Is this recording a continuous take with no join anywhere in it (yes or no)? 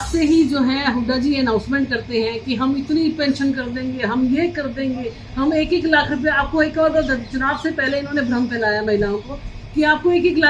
yes